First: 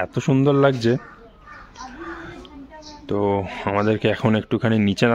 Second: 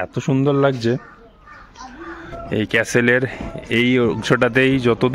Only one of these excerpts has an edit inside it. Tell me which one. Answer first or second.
second